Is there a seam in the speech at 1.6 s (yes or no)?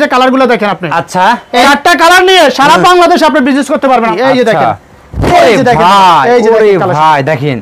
yes